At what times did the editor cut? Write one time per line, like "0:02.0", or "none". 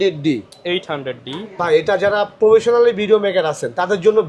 none